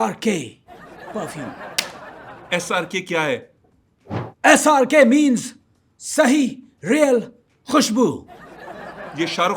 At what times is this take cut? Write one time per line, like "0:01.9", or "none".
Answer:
none